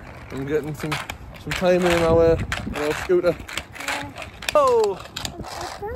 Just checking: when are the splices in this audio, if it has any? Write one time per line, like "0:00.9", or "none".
0:04.6